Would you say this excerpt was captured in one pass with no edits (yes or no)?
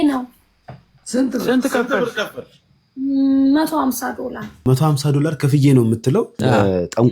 no